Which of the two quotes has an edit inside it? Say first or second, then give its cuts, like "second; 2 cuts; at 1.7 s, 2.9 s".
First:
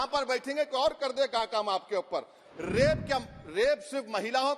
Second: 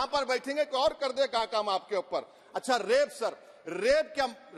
first; 1 cut; at 2.4 s